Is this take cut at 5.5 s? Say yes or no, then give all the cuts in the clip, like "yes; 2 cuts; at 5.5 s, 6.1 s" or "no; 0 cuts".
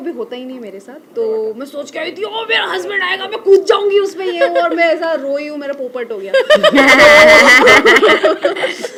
no; 0 cuts